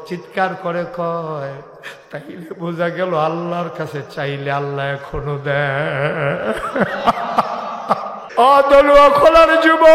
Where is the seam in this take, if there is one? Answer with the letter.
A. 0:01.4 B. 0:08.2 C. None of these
B